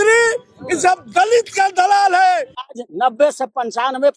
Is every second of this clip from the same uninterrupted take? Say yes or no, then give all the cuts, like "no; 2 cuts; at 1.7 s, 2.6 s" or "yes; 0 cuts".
no; 1 cut; at 2.9 s